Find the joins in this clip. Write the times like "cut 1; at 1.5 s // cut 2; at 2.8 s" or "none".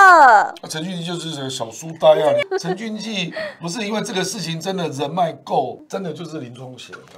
cut 1; at 2.4 s // cut 2; at 5.8 s